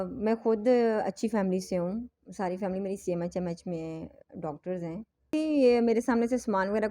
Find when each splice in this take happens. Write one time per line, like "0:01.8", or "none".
0:05.3

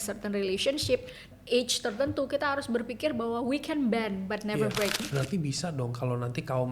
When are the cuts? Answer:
0:01.3
0:05.0

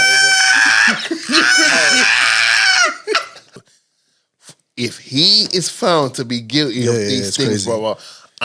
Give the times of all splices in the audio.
0:03.6

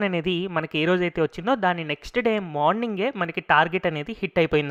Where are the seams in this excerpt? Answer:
none

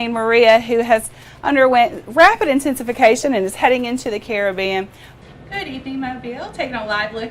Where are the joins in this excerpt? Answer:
0:05.0

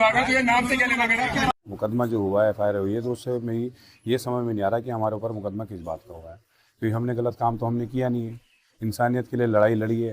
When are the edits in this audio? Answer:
0:01.5

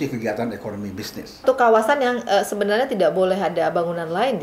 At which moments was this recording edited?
0:01.4

